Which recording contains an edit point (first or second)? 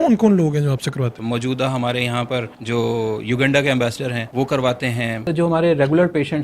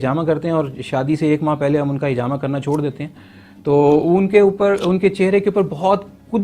first